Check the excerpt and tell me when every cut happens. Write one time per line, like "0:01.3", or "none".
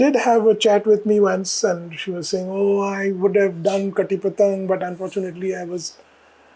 none